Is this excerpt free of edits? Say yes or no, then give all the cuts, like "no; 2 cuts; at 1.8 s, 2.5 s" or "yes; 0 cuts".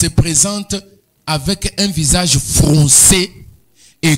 yes; 0 cuts